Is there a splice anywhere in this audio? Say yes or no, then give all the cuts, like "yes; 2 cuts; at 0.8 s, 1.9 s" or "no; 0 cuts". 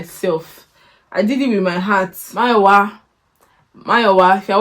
yes; 1 cut; at 2.2 s